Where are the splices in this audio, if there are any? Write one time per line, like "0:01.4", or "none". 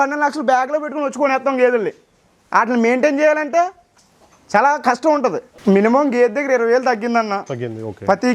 0:05.5